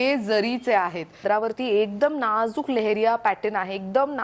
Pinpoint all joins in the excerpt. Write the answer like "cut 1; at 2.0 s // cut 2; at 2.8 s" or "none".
cut 1; at 1.2 s